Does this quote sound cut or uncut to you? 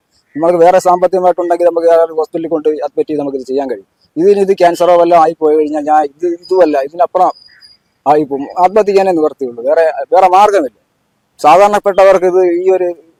uncut